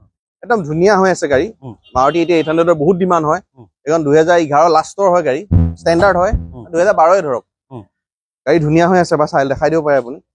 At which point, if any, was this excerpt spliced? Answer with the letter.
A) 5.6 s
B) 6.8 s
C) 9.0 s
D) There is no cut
D